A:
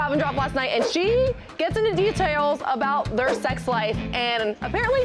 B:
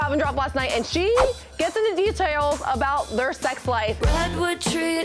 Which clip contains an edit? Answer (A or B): B